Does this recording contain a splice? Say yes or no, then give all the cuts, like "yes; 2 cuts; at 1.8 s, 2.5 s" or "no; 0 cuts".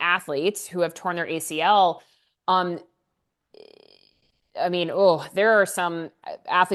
no; 0 cuts